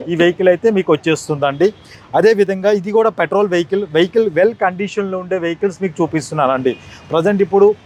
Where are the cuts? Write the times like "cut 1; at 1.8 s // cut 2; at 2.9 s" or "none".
none